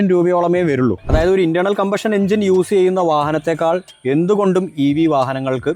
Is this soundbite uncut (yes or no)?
no